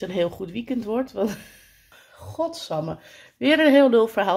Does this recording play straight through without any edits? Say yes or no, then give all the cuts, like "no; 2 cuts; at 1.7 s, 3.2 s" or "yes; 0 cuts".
no; 1 cut; at 1.9 s